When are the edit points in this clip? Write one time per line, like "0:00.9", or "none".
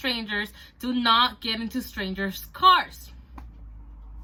none

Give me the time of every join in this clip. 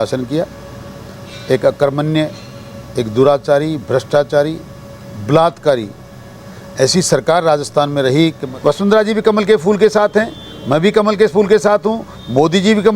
0:08.4

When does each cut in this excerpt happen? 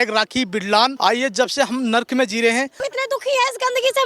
0:00.9
0:02.8

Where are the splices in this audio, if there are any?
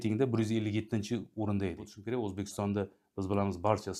0:01.9

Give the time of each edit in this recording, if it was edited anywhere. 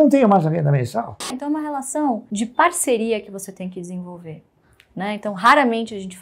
0:01.4
0:02.3

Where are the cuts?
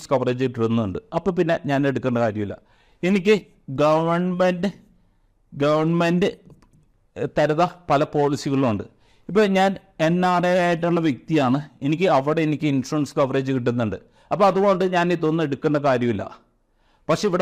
none

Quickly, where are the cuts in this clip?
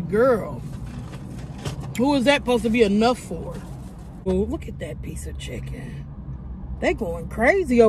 0:04.3

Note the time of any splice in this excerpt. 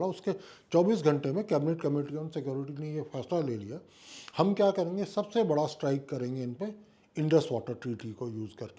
none

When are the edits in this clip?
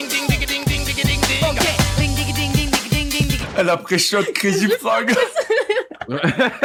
none

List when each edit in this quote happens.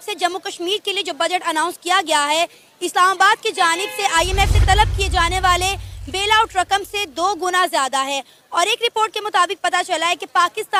none

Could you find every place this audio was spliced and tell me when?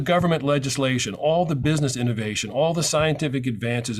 none

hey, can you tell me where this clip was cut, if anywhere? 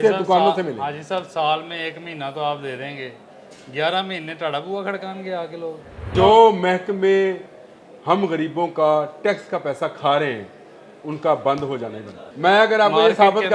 0:06.1
0:12.2

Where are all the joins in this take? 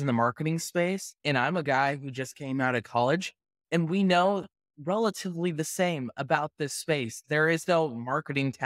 0:01.1

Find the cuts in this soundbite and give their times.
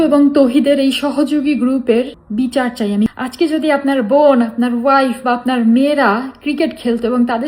0:02.2
0:03.1

